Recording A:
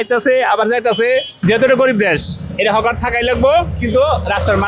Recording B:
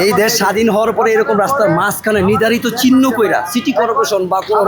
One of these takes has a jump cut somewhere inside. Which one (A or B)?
A